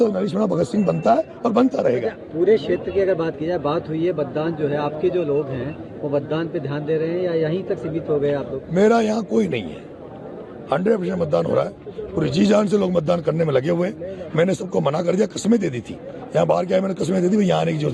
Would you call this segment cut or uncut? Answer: uncut